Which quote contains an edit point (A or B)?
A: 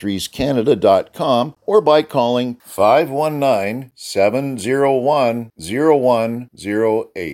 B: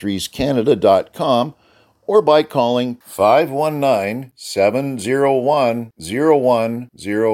A